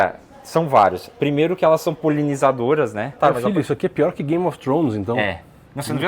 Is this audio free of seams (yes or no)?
no